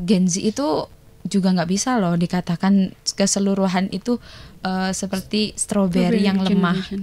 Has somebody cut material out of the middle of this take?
no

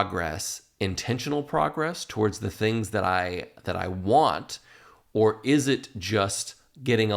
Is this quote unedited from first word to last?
yes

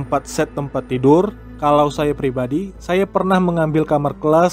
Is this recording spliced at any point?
yes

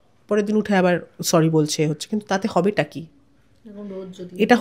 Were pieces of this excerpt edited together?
no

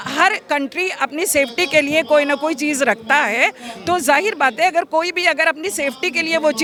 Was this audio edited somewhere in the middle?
no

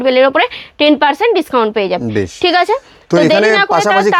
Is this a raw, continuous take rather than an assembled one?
yes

